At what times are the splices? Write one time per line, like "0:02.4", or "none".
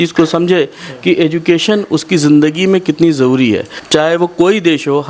0:03.7